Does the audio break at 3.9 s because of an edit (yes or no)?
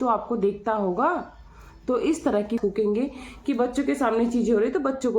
no